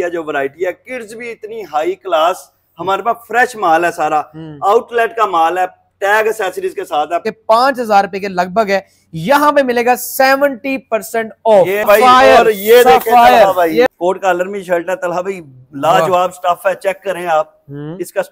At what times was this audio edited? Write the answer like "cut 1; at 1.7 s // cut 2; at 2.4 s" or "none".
cut 1; at 7.2 s // cut 2; at 11.9 s // cut 3; at 13.9 s